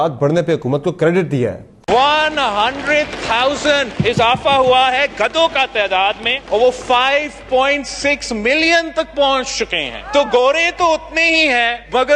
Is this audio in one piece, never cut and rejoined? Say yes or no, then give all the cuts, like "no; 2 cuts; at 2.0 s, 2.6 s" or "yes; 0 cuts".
no; 1 cut; at 1.7 s